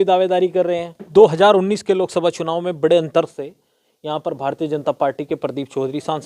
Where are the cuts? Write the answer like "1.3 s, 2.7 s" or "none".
1.0 s